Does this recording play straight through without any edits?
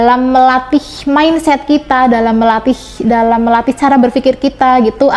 yes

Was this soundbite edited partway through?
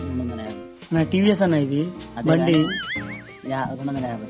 no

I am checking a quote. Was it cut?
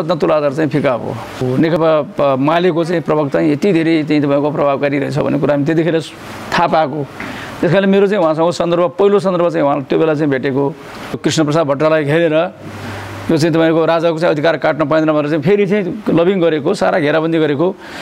yes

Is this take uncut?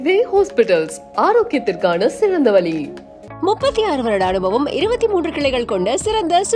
yes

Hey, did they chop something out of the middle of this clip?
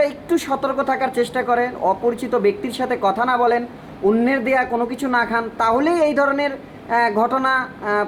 no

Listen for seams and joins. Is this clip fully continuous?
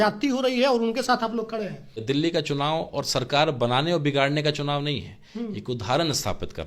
no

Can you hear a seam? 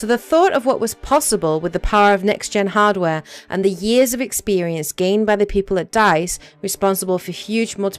yes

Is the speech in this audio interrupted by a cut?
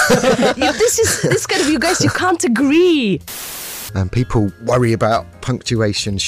yes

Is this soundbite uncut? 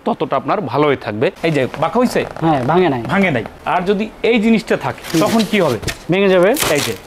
no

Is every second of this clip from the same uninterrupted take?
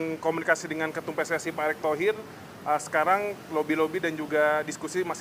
yes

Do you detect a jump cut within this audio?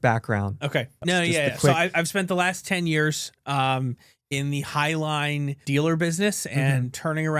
yes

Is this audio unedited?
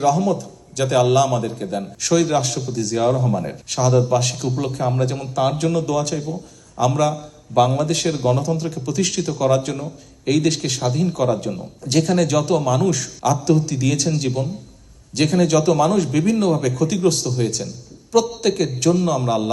no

